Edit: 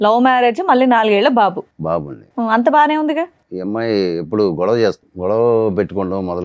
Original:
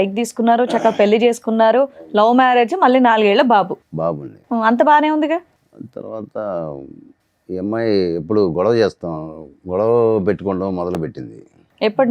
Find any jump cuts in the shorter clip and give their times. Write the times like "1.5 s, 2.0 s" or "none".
3.4 s, 5.1 s